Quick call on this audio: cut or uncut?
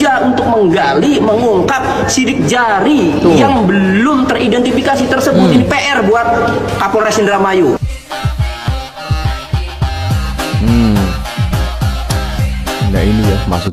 uncut